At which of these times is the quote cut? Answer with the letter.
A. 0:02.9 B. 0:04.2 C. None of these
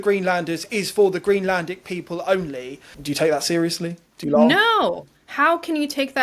A